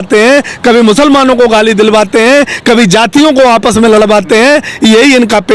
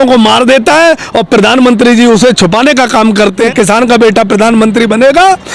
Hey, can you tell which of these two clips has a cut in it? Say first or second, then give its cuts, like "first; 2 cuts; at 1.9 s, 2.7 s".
second; 1 cut; at 3.4 s